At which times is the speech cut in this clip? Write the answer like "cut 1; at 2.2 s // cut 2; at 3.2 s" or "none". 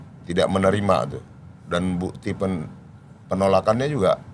none